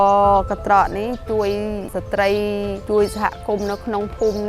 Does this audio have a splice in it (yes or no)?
yes